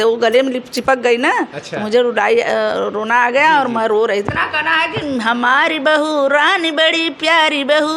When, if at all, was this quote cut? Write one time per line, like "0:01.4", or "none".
0:04.3